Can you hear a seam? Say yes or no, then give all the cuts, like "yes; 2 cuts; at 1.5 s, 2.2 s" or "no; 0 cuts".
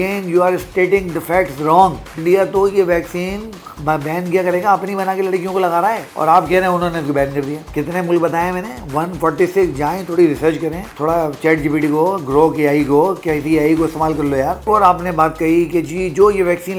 yes; 3 cuts; at 2.2 s, 7.6 s, 14.6 s